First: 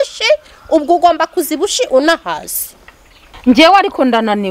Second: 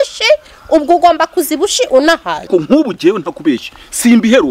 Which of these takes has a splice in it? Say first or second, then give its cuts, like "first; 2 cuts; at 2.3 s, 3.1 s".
second; 1 cut; at 2.5 s